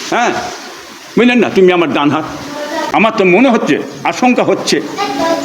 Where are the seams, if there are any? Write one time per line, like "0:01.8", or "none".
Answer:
0:02.8